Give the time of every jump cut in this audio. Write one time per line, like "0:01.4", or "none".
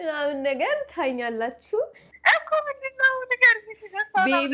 0:02.0